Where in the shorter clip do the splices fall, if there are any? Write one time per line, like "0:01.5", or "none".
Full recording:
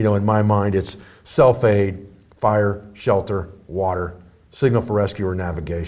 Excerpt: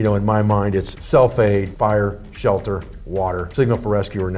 0:01.0
0:01.7
0:03.5